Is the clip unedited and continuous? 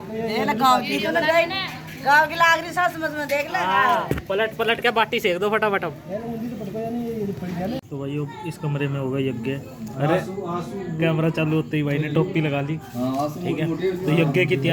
yes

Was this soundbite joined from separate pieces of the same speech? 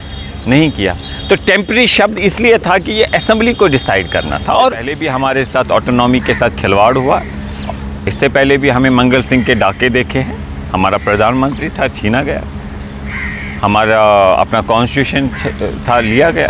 yes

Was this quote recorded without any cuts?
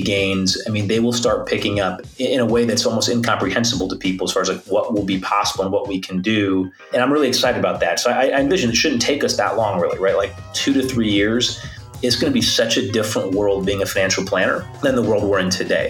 no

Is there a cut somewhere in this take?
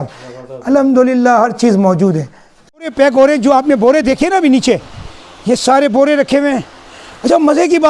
yes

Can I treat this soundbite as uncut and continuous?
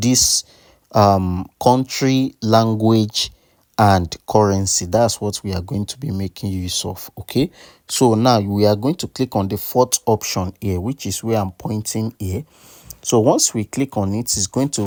yes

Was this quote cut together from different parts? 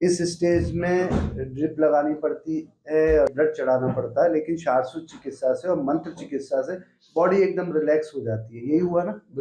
yes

